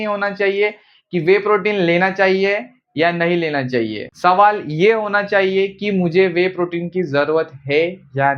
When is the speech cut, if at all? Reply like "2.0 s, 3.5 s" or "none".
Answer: none